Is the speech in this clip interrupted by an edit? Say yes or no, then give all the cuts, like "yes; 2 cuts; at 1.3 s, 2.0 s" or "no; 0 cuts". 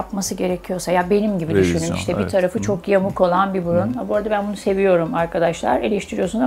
no; 0 cuts